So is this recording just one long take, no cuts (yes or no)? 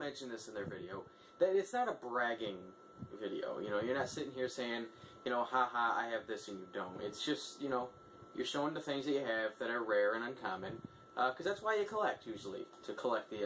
no